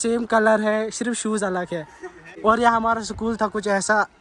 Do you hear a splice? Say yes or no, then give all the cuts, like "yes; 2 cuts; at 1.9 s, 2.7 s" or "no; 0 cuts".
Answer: yes; 1 cut; at 2.2 s